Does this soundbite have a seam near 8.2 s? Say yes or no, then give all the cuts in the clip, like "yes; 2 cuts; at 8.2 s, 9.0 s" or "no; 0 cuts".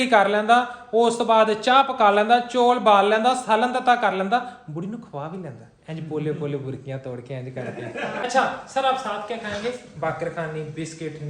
yes; 1 cut; at 8.2 s